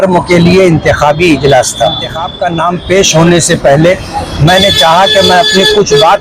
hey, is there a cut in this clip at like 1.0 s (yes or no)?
no